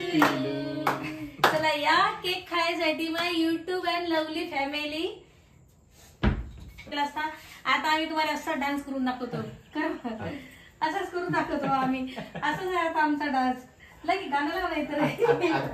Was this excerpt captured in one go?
no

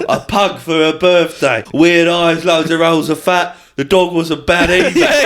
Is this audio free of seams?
no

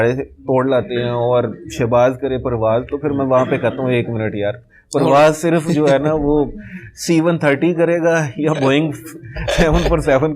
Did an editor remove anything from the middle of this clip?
no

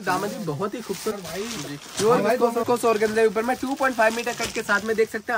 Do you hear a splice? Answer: yes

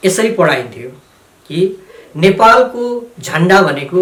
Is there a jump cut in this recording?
no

